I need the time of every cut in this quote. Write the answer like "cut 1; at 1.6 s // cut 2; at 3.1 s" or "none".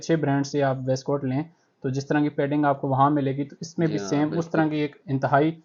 none